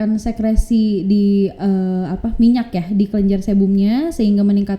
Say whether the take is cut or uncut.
uncut